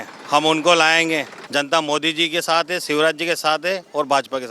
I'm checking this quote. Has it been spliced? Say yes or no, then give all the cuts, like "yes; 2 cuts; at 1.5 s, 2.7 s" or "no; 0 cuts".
yes; 1 cut; at 1.4 s